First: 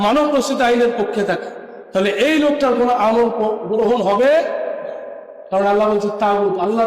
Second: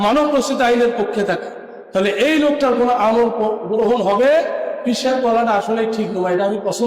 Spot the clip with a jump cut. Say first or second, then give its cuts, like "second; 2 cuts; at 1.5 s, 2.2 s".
second; 1 cut; at 4.7 s